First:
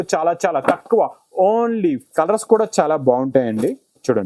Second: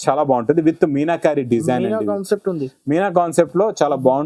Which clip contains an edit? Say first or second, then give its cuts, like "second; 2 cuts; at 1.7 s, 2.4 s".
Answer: first; 1 cut; at 2.0 s